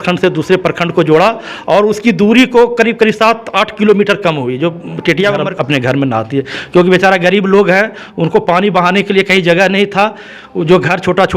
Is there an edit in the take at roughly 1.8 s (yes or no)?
no